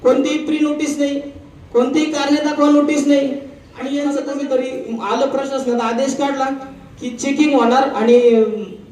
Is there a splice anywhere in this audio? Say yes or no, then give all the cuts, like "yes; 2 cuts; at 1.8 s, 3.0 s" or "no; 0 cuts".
yes; 1 cut; at 4.0 s